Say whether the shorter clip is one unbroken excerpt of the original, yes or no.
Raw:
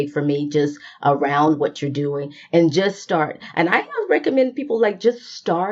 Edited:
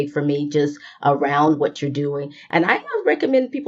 no